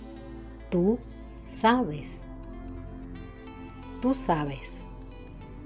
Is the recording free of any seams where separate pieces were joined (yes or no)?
yes